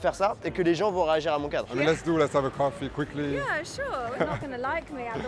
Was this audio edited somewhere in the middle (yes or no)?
yes